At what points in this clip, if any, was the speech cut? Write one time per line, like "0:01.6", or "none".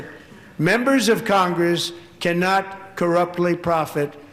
none

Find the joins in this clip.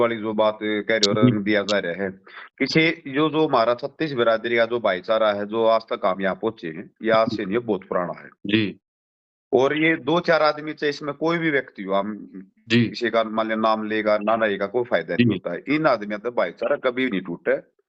none

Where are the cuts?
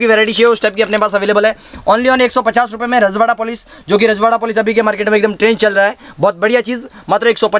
none

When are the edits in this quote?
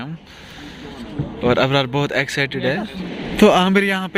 0:03.0

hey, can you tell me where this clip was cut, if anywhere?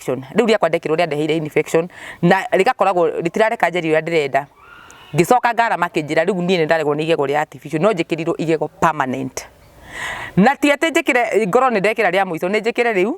none

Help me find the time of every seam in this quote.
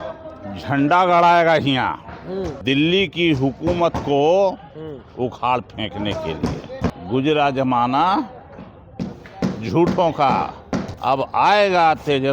0:02.5
0:06.9
0:10.9

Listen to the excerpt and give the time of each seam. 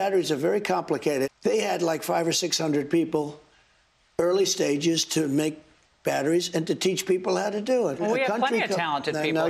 0:01.3
0:08.0

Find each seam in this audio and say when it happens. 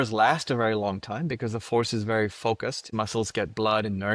0:02.9

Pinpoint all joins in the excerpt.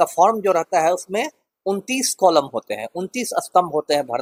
none

